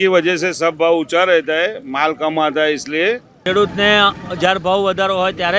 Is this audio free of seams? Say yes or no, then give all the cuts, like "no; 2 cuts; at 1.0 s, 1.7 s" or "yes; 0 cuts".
no; 1 cut; at 3.3 s